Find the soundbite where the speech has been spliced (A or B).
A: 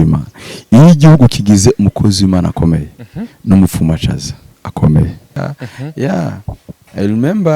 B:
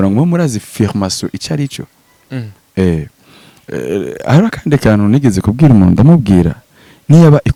A